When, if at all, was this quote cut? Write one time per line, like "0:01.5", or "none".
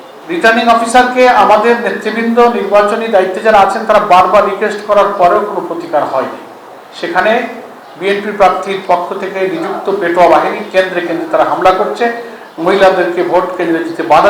none